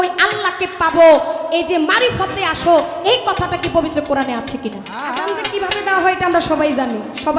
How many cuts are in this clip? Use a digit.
1